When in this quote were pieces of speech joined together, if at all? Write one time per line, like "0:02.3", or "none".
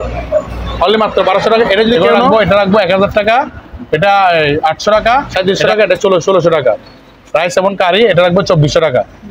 0:02.1
0:05.3